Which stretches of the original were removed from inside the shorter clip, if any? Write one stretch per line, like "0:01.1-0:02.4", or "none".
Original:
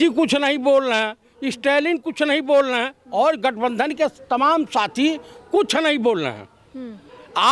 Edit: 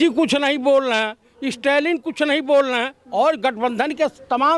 none